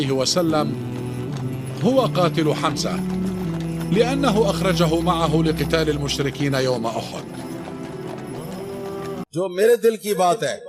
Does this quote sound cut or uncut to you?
cut